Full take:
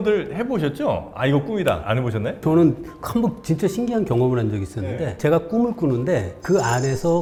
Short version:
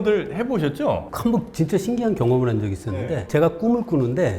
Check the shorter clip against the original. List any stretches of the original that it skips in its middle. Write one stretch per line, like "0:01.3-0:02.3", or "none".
0:01.1-0:03.0